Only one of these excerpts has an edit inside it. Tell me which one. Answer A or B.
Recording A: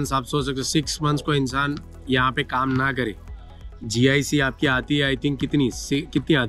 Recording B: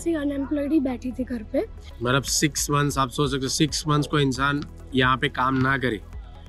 B